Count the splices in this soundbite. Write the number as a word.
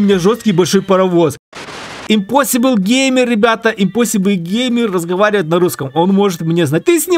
one